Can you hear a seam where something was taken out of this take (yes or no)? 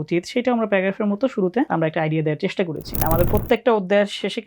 yes